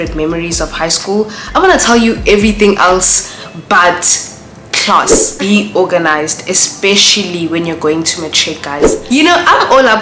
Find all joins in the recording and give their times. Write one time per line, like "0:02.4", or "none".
0:05.2
0:08.9